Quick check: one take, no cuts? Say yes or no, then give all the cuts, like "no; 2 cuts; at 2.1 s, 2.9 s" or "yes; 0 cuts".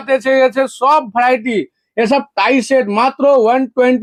yes; 0 cuts